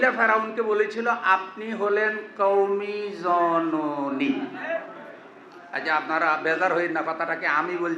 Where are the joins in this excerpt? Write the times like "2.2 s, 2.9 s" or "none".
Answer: none